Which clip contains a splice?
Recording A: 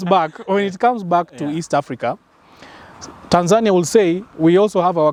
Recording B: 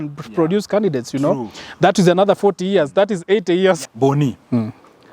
B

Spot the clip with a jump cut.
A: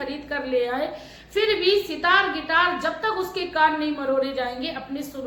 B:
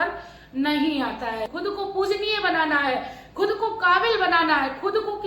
B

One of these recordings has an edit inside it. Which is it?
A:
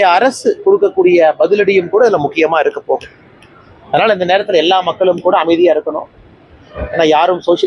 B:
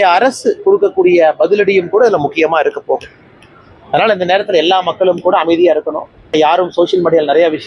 B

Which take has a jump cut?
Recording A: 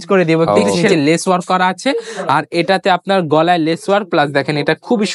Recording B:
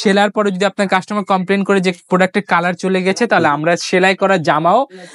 A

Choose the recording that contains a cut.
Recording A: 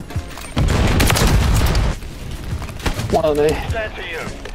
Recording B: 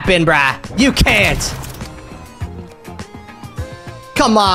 A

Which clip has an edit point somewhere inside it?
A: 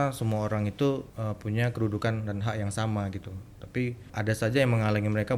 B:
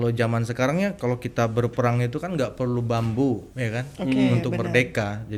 A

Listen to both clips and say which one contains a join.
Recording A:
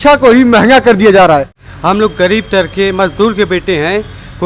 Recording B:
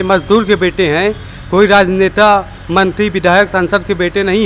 A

